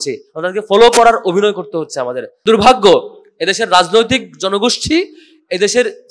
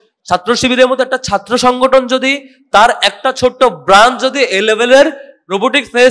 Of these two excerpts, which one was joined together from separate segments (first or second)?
first